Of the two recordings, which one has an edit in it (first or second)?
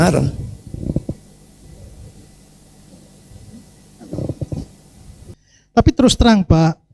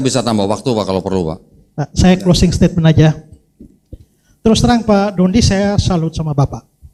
first